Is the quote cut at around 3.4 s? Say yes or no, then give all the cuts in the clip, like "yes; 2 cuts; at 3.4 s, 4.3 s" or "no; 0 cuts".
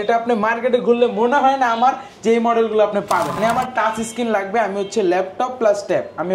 yes; 1 cut; at 3.4 s